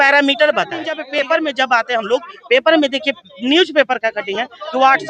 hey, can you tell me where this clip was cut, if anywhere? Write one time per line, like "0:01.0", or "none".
0:01.0